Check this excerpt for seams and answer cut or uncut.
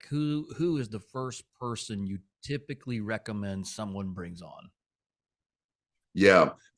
uncut